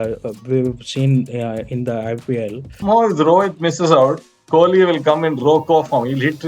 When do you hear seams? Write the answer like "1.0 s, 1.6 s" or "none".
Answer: 2.8 s